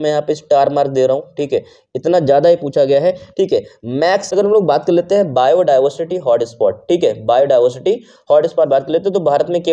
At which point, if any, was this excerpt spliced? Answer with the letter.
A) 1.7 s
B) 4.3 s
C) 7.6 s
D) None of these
B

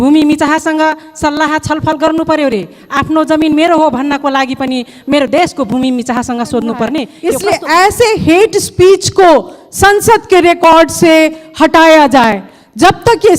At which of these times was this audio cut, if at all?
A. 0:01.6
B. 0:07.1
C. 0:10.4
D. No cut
B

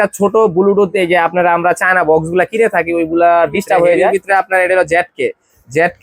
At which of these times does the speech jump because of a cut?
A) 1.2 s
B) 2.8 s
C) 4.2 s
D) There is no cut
C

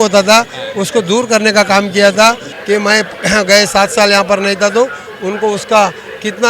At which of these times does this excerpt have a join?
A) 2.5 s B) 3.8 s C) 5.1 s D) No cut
A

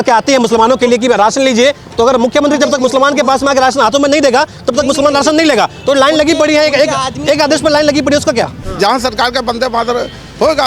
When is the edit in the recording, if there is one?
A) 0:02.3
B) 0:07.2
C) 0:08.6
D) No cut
C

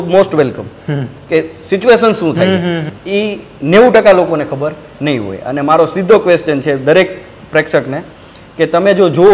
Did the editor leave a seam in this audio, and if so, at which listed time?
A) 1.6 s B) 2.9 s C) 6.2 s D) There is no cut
B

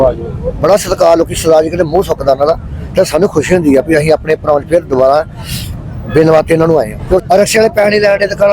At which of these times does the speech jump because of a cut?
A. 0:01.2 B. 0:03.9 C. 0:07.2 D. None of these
C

